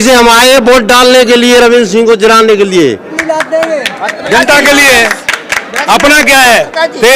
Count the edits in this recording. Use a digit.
1